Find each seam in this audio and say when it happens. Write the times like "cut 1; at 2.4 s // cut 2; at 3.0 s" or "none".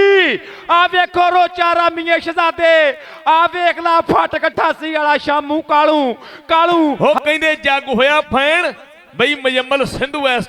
cut 1; at 7.0 s

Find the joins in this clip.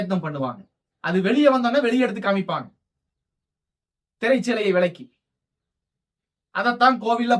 none

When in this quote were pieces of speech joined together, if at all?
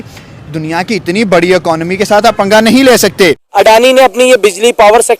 cut 1; at 3.4 s

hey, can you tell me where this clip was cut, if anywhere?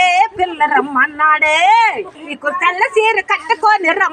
cut 1; at 2.0 s

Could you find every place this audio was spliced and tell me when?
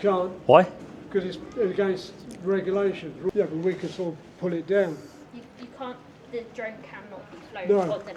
cut 1; at 3.3 s

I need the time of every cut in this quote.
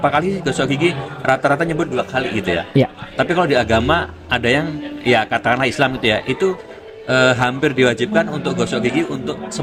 none

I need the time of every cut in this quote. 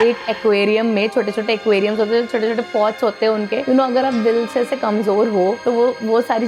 cut 1; at 3.6 s

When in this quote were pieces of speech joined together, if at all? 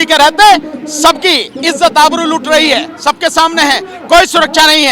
none

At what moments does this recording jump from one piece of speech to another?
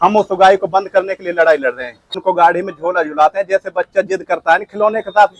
cut 1; at 2.2 s

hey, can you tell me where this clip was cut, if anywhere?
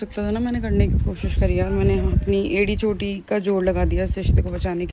none

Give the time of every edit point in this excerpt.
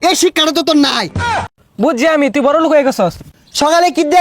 cut 1; at 1.5 s // cut 2; at 3.2 s

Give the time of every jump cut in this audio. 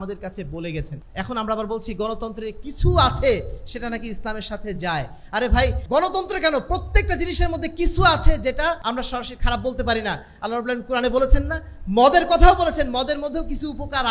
cut 1; at 1.0 s // cut 2; at 5.8 s // cut 3; at 8.8 s

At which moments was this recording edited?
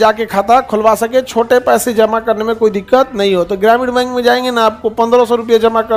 none

